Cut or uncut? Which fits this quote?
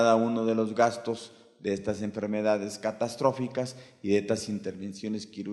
cut